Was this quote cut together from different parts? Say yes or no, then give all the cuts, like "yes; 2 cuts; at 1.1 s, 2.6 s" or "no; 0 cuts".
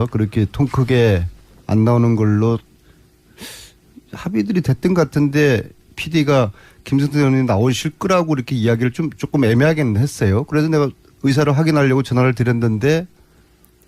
yes; 1 cut; at 6.1 s